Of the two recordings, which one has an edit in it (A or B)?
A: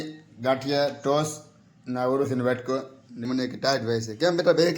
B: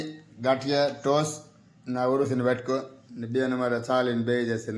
A